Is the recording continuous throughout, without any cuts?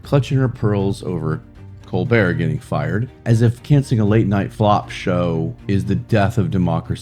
no; 3 cuts; at 3.1 s, 4.5 s, 5.6 s

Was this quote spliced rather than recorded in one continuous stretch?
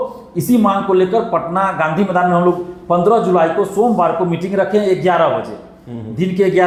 no; 0 cuts

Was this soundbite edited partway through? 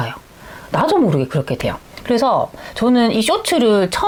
no; 0 cuts

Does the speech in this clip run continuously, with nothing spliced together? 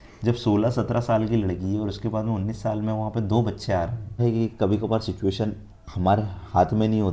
no; 1 cut; at 4.2 s

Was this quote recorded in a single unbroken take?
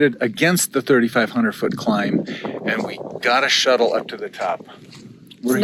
yes; 0 cuts

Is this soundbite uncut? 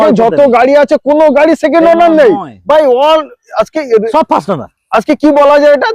yes; 0 cuts

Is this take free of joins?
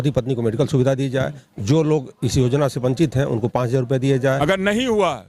no; 1 cut; at 4.4 s

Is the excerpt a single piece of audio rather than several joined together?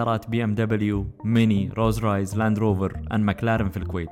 yes; 0 cuts

